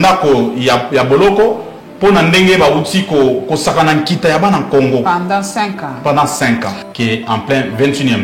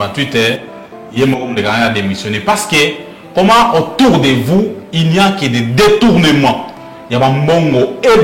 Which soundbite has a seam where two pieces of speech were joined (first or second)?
first